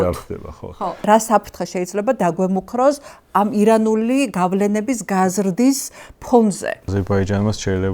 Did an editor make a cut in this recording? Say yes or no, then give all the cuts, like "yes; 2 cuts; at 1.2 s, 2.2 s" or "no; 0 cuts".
yes; 2 cuts; at 1.0 s, 6.9 s